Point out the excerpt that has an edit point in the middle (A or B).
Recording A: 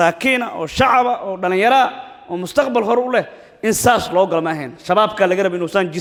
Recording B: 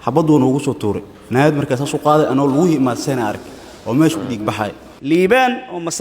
B